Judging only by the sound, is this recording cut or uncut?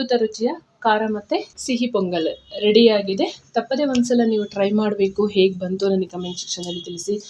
cut